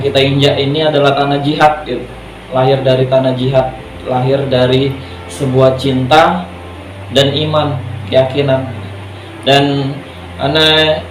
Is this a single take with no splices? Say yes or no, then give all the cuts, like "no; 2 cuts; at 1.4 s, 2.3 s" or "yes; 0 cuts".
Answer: yes; 0 cuts